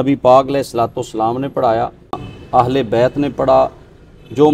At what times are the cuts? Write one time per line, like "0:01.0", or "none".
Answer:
0:02.3